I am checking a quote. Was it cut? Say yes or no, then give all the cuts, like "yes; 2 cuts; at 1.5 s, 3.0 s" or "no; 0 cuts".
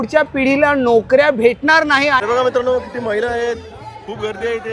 yes; 1 cut; at 2.2 s